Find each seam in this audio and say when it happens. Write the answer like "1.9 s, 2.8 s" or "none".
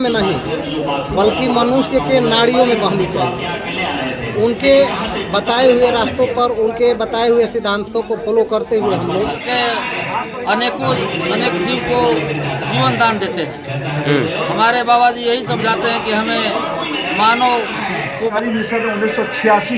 9.4 s, 18.3 s